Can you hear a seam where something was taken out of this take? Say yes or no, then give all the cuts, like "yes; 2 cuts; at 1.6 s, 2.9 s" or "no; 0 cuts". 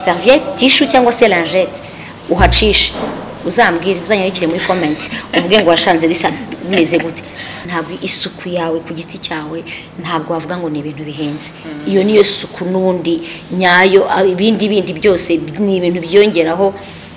yes; 1 cut; at 7.5 s